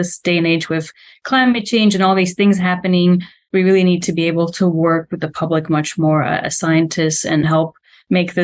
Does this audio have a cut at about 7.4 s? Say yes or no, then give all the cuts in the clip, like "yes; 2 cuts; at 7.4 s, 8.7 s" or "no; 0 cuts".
yes; 1 cut; at 7.4 s